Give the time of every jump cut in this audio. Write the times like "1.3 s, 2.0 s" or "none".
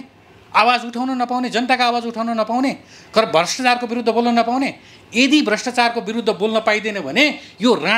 none